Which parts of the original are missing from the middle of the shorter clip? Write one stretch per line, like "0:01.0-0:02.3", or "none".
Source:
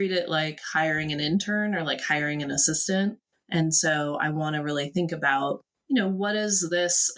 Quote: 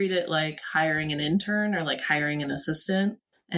none